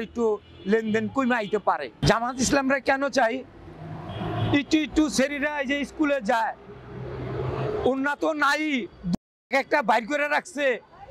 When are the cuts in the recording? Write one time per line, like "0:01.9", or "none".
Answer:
0:02.0